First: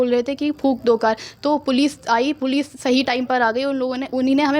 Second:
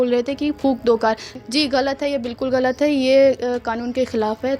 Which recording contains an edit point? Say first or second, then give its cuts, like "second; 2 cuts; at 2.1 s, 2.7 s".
second; 1 cut; at 1.3 s